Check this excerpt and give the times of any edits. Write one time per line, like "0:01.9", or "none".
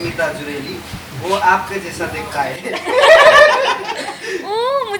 none